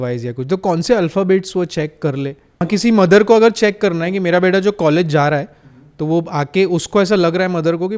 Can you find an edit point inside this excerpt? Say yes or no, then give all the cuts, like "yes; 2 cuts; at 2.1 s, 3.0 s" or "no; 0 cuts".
yes; 1 cut; at 2.7 s